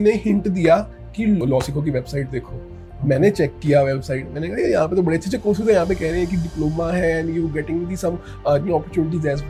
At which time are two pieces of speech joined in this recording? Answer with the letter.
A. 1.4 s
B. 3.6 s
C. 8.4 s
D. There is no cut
A